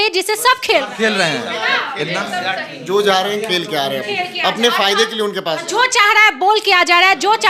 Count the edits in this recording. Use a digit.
0